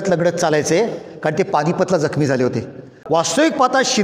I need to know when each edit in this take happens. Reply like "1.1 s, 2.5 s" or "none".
2.9 s